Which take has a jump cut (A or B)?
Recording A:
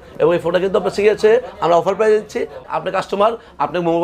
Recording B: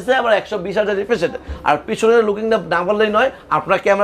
A